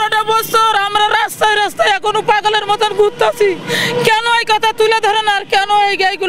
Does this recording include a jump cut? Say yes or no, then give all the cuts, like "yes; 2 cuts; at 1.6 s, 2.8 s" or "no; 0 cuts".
no; 0 cuts